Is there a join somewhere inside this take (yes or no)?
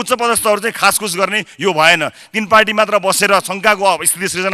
no